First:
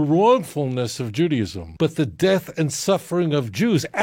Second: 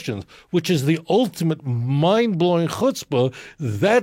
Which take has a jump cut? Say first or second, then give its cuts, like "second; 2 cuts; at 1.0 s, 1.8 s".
first; 1 cut; at 1.6 s